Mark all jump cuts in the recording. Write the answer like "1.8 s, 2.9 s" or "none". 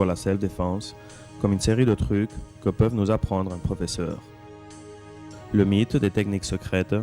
3.8 s